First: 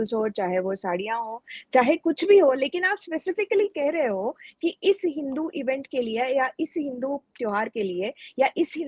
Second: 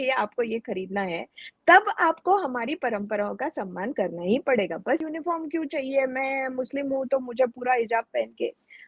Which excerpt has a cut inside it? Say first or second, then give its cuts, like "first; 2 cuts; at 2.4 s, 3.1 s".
second; 1 cut; at 5.0 s